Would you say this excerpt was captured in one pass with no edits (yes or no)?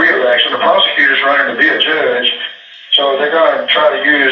yes